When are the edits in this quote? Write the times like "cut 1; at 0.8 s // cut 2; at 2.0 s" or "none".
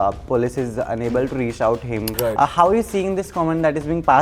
cut 1; at 2.1 s